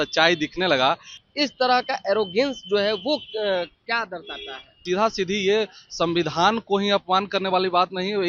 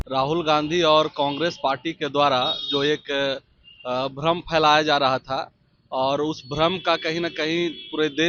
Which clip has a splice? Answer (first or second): first